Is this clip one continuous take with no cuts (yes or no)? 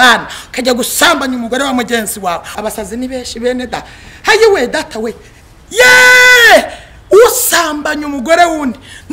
no